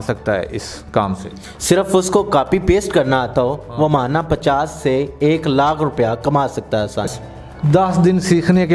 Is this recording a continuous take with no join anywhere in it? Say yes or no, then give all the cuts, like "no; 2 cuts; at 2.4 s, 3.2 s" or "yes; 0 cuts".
no; 1 cut; at 7.1 s